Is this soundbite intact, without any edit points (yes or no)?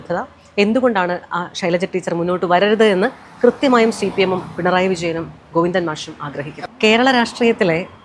no